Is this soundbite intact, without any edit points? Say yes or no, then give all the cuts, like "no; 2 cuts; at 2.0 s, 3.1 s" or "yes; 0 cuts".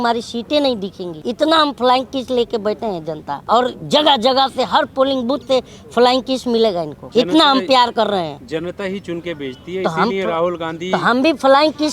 no; 3 cuts; at 1.1 s, 3.3 s, 7.0 s